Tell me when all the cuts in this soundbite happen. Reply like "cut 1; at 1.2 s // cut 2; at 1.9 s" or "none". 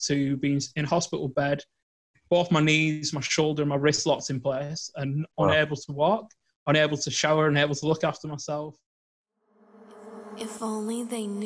cut 1; at 9.0 s